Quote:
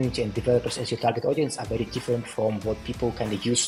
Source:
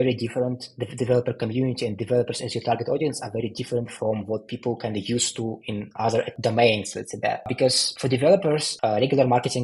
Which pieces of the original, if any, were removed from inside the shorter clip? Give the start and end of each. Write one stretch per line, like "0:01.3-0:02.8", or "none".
none